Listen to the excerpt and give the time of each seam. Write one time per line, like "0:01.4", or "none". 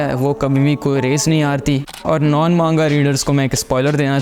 0:01.9